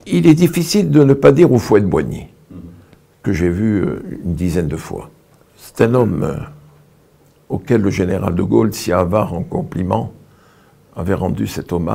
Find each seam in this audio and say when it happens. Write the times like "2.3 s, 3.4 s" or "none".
none